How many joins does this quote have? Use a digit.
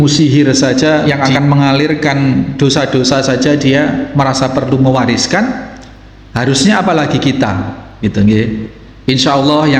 1